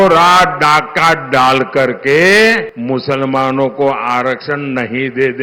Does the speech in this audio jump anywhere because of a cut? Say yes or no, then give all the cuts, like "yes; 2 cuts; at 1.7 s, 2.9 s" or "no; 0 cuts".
yes; 1 cut; at 2.7 s